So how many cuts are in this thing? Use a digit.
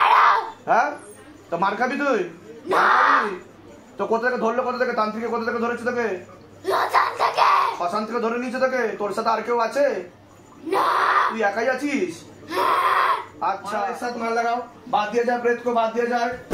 1